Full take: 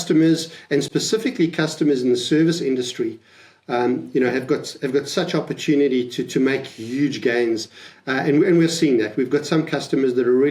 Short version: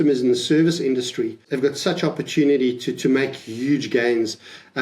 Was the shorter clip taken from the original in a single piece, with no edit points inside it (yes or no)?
no